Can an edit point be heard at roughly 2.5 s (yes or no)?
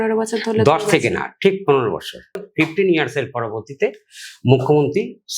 yes